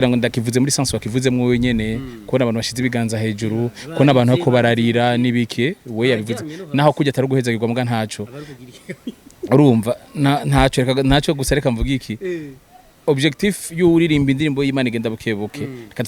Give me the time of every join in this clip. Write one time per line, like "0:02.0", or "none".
none